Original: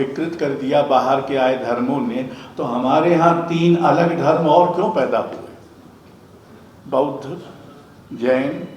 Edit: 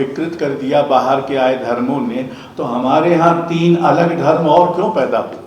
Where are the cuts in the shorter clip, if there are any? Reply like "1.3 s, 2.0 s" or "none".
none